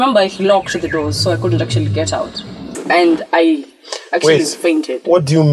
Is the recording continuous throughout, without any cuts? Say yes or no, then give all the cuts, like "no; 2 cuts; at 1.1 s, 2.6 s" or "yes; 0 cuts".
no; 1 cut; at 2.8 s